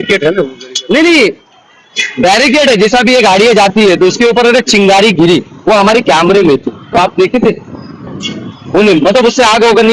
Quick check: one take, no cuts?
yes; 0 cuts

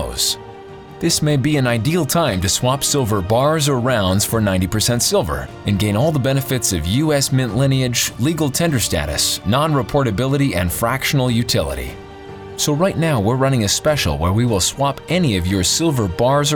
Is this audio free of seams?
yes; 0 cuts

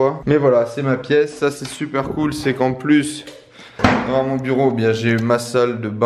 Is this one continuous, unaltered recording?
yes; 0 cuts

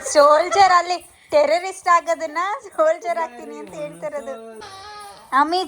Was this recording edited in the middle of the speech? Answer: yes; 1 cut; at 4.7 s

